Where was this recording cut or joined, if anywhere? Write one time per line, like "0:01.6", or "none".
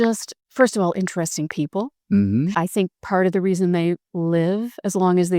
0:02.6

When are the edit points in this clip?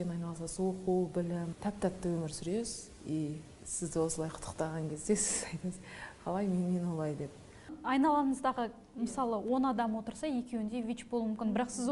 0:01.5
0:07.8

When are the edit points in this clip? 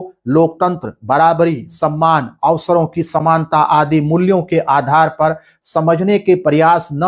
none

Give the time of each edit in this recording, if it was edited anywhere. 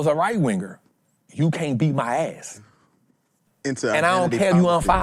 0:03.4

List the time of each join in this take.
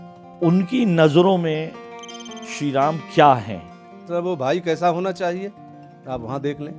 0:03.9

